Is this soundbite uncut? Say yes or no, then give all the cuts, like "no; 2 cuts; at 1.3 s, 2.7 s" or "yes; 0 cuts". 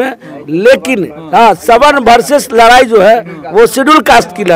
yes; 0 cuts